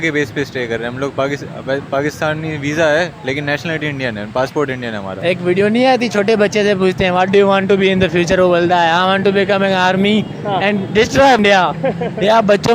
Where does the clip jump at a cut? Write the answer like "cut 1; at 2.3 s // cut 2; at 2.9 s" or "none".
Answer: cut 1; at 5.2 s // cut 2; at 11.4 s

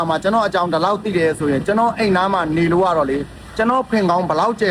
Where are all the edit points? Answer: none

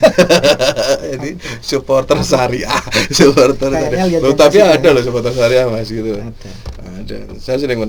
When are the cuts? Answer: none

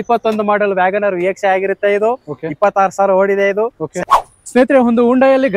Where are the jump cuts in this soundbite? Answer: cut 1; at 4.1 s

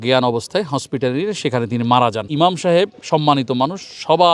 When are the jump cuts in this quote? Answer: cut 1; at 2.2 s

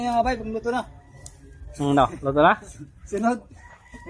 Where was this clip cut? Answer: none

